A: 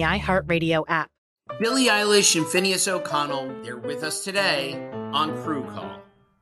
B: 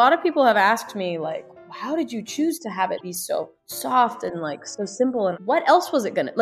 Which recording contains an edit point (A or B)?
A